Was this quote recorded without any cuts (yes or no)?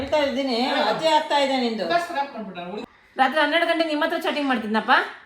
no